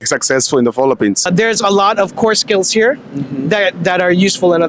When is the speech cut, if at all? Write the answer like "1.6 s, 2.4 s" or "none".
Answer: 1.3 s